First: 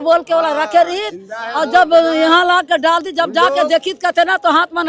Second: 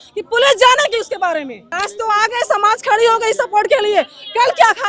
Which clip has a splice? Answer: second; 1 cut; at 1.6 s

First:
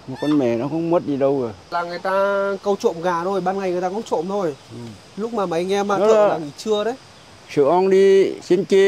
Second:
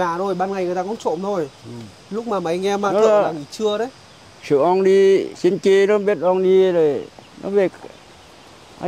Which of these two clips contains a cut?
first; 1 cut; at 1.6 s

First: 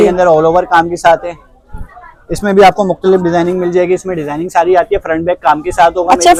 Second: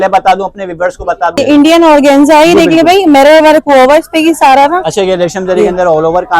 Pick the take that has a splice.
second; 1 cut; at 1.4 s

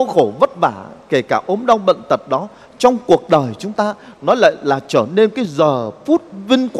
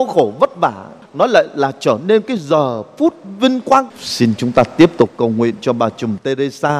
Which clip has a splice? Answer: second; 2 cuts; at 0.9 s, 3.9 s

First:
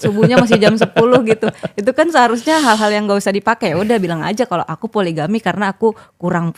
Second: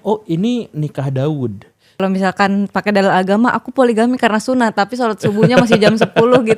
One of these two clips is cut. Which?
second; 1 cut; at 2.0 s

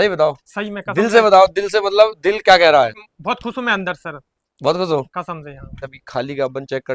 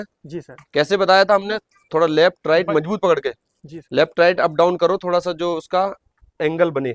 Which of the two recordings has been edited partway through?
first; 2 cuts; at 3.0 s, 5.8 s

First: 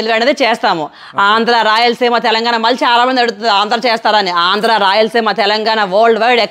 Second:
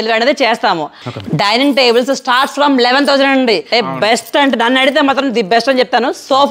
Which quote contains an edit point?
second; 2 cuts; at 1.0 s, 3.7 s

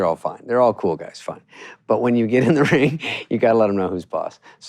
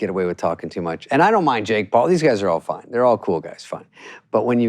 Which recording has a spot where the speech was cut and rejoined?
second; 1 cut; at 1.0 s

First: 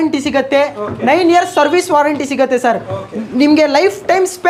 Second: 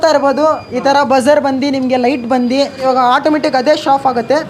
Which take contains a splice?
second; 1 cut; at 2.8 s

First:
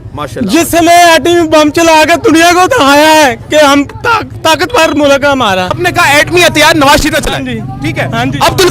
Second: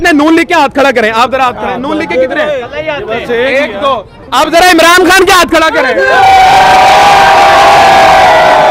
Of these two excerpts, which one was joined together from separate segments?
first; 2 cuts; at 4.3 s, 5.8 s

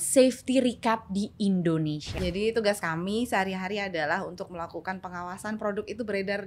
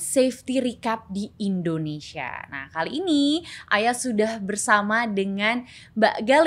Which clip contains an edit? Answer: first; 1 cut; at 2.1 s

